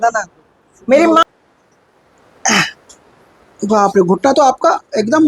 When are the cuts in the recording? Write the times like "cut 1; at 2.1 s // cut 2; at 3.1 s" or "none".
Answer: cut 1; at 1.2 s